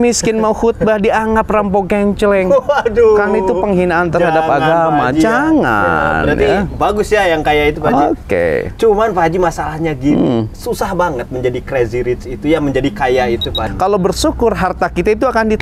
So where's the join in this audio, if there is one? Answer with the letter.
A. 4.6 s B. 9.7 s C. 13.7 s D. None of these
C